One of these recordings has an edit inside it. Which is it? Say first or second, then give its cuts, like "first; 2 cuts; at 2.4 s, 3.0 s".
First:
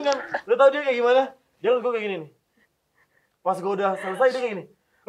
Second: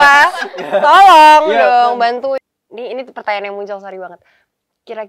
second; 1 cut; at 2.3 s